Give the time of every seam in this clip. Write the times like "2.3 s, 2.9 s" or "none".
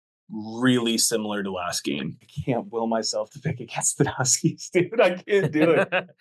2.3 s